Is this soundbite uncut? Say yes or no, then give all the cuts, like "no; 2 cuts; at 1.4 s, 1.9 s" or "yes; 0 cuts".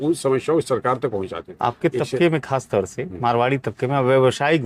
no; 1 cut; at 1.4 s